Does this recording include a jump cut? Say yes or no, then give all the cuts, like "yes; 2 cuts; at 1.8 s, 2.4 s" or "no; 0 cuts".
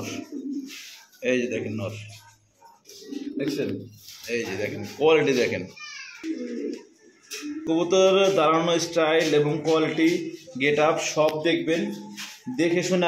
yes; 1 cut; at 6.2 s